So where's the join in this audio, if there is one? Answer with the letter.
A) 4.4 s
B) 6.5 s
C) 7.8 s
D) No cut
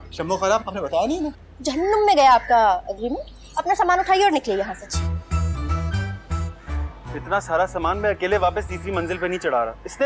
D